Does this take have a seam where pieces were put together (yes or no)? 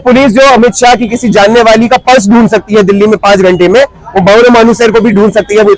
no